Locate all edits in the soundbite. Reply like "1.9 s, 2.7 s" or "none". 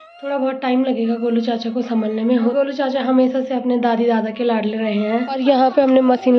2.5 s, 5.4 s